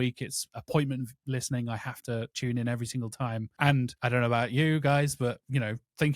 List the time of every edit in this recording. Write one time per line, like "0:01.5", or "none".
0:02.3
0:03.9